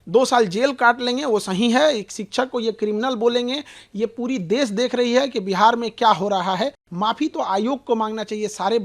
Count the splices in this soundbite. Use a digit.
1